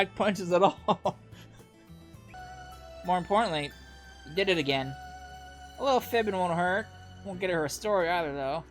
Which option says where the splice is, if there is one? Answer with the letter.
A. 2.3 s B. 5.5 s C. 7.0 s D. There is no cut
A